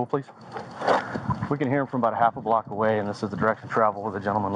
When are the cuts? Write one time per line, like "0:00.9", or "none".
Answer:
0:01.0